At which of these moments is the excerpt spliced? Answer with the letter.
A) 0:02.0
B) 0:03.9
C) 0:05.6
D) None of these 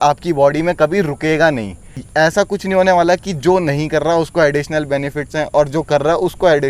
A